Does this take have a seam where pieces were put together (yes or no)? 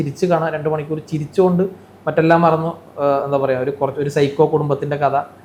no